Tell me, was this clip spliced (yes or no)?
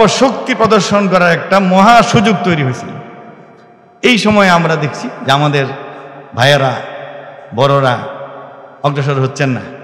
no